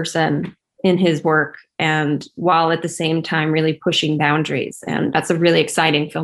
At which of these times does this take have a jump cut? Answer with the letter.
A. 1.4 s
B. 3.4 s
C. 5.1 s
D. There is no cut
C